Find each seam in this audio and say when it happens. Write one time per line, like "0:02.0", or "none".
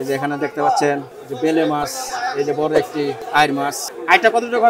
0:01.1